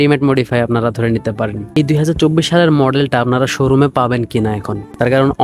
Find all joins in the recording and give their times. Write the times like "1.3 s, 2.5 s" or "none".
1.7 s